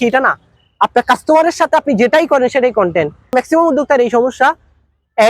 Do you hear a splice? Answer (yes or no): yes